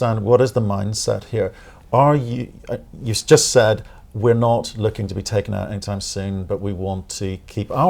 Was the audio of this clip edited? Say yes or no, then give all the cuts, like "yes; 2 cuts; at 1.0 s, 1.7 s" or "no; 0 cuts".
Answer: no; 0 cuts